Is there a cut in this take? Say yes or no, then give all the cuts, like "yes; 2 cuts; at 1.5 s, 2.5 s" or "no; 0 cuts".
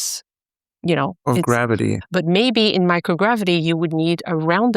yes; 1 cut; at 2.0 s